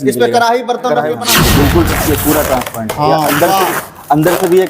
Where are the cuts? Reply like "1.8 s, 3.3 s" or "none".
1.3 s